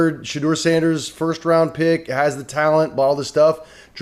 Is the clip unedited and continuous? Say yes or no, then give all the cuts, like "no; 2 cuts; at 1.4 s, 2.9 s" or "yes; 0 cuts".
yes; 0 cuts